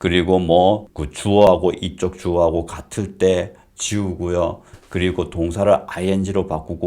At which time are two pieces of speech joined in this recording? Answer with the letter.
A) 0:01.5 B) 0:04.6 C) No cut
A